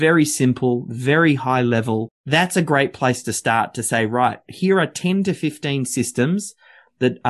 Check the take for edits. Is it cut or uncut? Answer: uncut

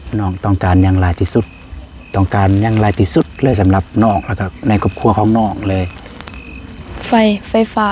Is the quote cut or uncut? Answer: uncut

